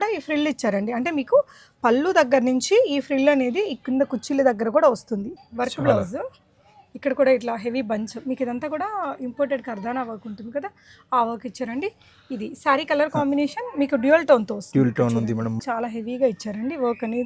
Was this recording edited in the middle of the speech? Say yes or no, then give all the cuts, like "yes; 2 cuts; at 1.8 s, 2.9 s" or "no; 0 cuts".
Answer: yes; 2 cuts; at 5.3 s, 15.6 s